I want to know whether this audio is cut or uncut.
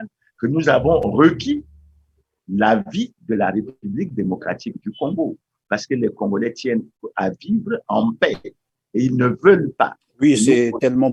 uncut